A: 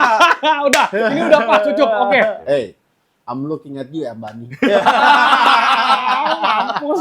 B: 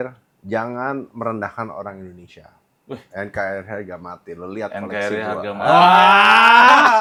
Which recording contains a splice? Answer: A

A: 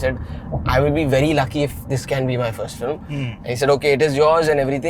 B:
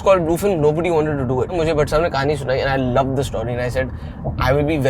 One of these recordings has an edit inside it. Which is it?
B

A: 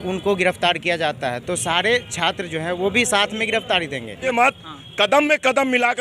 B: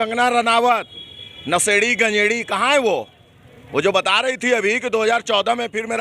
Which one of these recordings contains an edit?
A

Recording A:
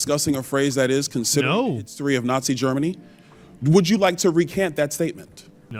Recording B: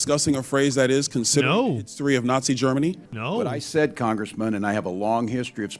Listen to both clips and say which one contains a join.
B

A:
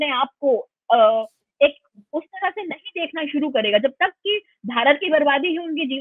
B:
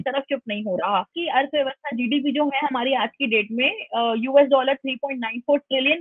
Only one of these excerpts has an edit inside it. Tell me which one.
B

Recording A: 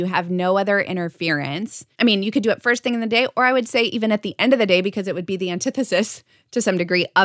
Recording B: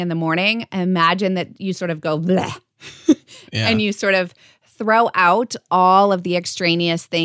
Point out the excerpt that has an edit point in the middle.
A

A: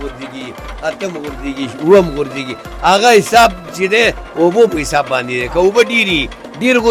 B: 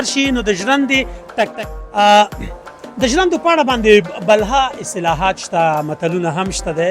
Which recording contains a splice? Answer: B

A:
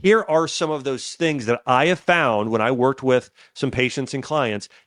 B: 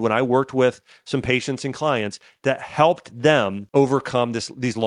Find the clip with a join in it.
B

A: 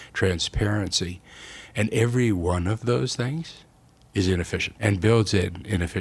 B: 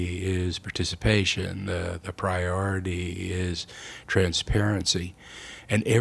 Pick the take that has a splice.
A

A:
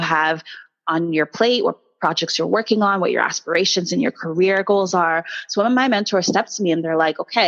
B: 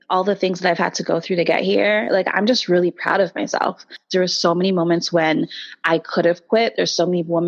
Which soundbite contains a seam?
B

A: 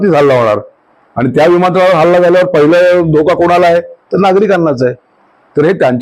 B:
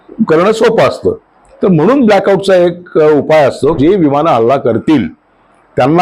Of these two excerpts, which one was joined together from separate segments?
B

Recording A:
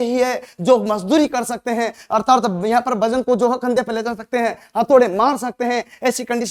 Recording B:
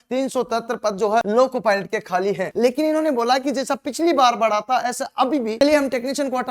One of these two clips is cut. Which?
B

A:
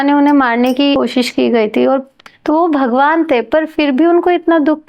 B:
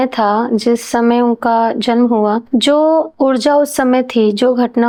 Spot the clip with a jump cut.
A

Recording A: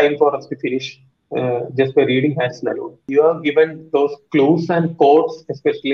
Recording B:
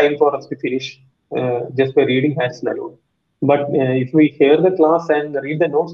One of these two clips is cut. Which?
A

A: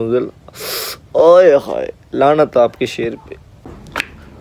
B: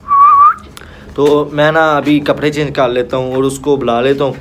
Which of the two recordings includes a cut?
A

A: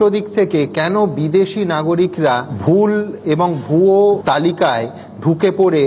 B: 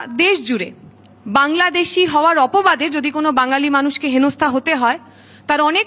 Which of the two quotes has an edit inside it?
A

